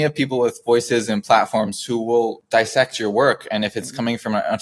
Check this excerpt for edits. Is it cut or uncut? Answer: cut